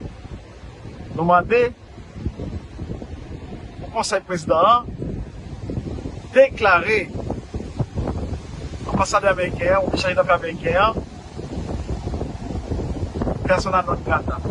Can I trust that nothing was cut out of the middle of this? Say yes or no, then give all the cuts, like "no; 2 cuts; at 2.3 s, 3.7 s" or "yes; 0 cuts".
yes; 0 cuts